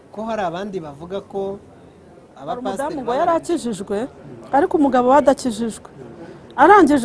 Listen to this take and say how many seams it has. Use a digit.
1